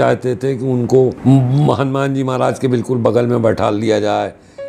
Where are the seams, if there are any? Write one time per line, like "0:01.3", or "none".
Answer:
0:01.2